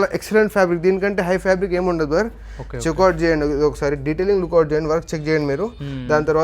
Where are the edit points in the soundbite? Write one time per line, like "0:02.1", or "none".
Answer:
none